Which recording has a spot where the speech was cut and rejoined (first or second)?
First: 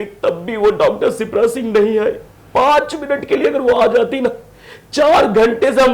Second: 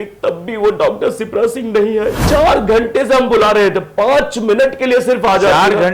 second